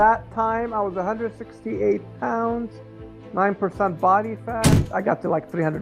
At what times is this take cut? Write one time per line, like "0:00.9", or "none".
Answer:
0:04.9